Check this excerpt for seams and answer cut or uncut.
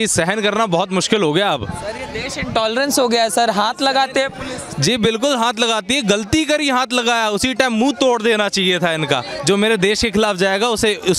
uncut